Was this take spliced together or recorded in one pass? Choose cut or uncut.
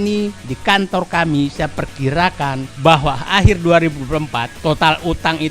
cut